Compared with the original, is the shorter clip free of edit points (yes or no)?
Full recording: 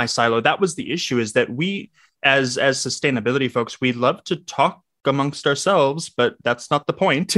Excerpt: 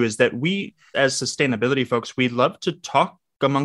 no